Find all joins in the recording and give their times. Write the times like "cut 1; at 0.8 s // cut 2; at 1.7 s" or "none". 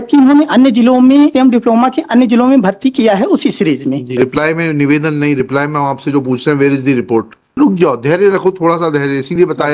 cut 1; at 1.3 s // cut 2; at 4.1 s // cut 3; at 7.5 s